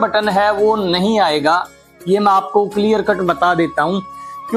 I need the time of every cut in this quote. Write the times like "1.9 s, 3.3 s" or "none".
none